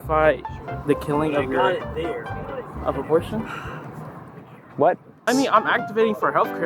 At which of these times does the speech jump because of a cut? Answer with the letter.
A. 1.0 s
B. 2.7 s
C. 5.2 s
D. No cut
C